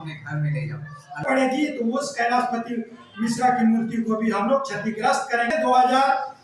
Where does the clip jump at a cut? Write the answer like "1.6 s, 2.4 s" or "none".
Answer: 1.2 s, 5.5 s